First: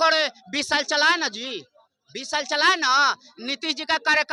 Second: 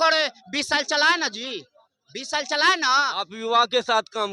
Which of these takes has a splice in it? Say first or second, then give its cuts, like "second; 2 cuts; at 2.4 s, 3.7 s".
second; 1 cut; at 3.3 s